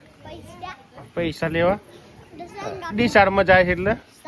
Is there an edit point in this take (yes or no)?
no